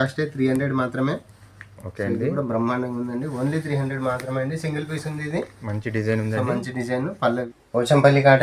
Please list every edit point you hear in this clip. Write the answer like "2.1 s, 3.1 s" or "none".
7.5 s